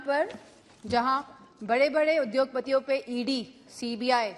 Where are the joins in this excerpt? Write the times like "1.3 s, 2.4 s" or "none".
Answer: none